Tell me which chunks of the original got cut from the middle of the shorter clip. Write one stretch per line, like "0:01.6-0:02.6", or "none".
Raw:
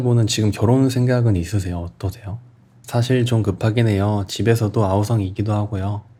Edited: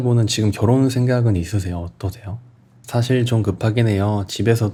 none